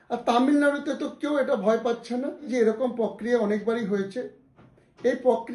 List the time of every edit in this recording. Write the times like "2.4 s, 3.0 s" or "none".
2.5 s